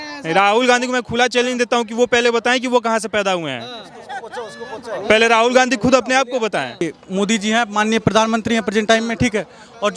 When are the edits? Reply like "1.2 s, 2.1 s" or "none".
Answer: 6.8 s